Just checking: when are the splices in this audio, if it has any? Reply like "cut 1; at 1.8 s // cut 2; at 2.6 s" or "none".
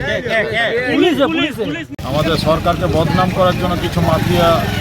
cut 1; at 1.9 s